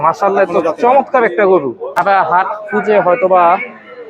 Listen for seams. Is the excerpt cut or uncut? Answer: cut